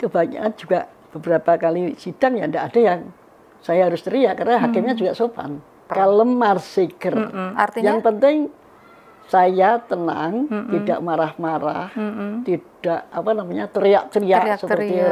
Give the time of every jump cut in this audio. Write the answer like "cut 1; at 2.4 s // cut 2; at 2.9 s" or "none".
cut 1; at 5.9 s